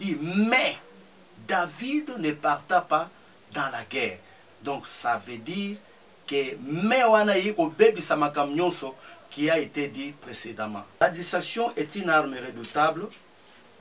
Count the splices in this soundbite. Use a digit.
1